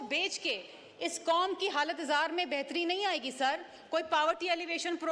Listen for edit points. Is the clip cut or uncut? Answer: uncut